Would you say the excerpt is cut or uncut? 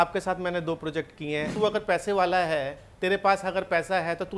cut